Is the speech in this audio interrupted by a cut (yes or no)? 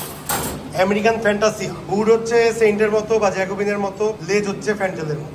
yes